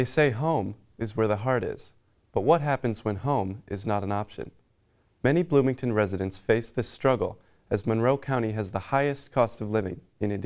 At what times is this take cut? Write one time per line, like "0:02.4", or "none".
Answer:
none